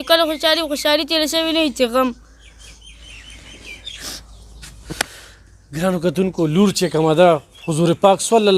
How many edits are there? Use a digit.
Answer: 0